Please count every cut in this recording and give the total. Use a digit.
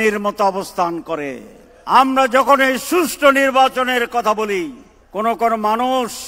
1